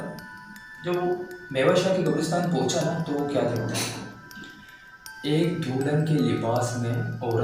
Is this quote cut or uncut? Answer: uncut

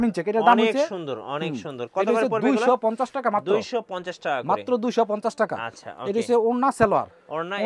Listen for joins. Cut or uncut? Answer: uncut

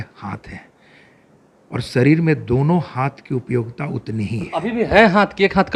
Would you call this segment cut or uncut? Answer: uncut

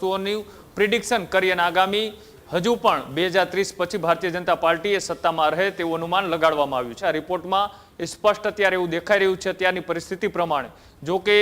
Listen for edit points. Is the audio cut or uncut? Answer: cut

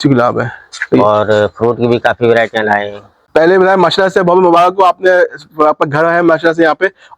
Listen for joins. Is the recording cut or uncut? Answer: cut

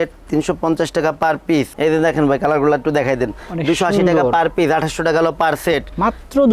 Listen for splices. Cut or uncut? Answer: cut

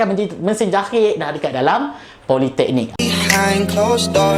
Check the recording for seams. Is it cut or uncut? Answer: cut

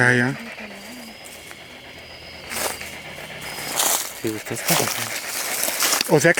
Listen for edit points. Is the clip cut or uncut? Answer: uncut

